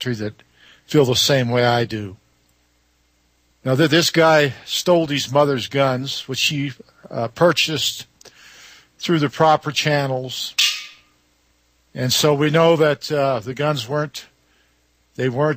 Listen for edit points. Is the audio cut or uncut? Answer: cut